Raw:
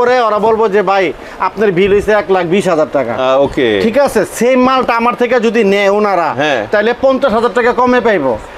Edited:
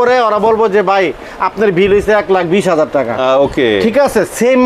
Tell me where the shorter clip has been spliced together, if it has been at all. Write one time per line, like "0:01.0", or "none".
none